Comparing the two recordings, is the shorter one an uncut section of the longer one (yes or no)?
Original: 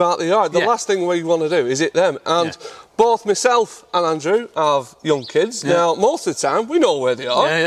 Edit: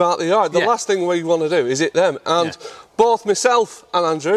yes